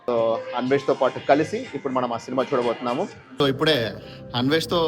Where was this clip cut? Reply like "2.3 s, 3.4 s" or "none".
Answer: 3.4 s